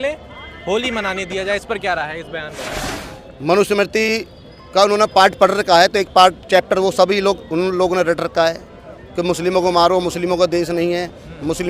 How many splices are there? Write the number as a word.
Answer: one